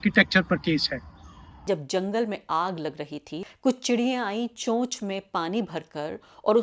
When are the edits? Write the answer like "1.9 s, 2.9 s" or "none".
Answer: 1.6 s, 3.3 s